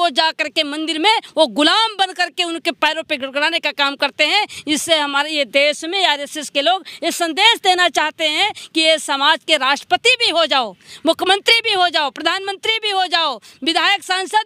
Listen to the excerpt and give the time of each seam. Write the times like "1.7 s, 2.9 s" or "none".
none

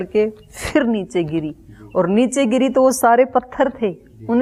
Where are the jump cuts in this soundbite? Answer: none

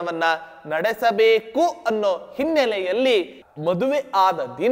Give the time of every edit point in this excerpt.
3.4 s

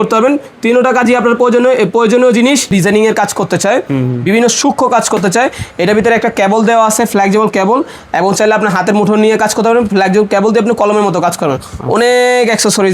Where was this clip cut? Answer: 2.7 s

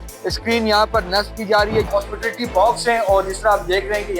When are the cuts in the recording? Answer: 1.9 s

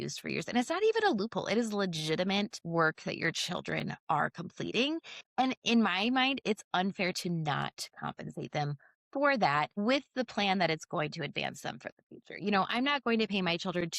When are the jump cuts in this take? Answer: 2.6 s, 9.7 s

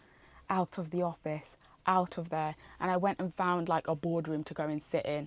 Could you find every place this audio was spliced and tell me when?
none

